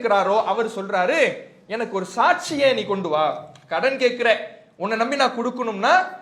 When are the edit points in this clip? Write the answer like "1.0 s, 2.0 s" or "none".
none